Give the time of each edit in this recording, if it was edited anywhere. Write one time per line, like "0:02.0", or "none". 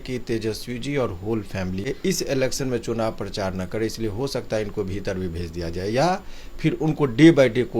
0:01.9